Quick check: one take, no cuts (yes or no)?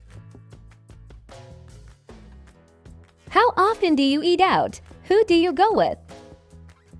no